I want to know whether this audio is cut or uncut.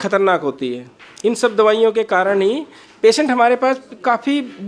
uncut